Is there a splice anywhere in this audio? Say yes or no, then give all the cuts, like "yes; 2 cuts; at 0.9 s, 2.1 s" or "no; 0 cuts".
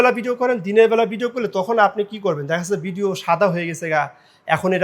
no; 0 cuts